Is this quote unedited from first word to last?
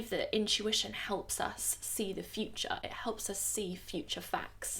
yes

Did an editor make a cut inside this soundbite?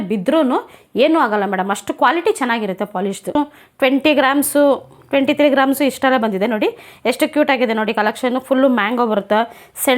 yes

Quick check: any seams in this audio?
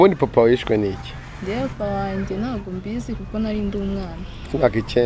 no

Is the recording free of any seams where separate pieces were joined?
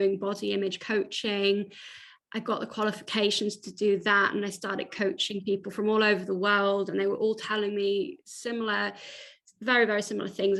yes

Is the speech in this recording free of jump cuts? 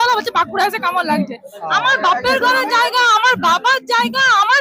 yes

